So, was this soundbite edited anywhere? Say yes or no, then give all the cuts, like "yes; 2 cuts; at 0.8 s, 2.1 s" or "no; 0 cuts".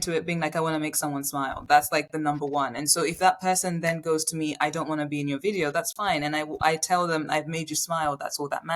no; 0 cuts